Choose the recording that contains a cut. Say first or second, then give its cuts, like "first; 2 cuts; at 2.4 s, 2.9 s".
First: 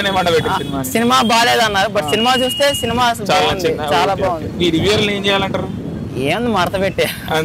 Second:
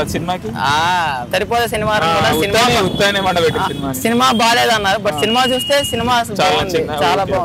second; 1 cut; at 1.3 s